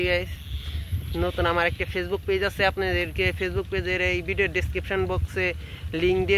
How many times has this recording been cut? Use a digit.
0